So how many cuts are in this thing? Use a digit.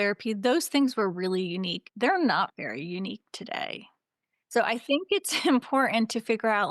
1